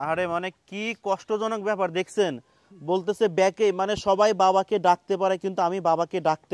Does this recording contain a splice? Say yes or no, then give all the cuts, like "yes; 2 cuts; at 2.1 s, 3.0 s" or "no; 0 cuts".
no; 0 cuts